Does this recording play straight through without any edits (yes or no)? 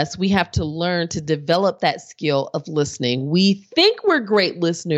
yes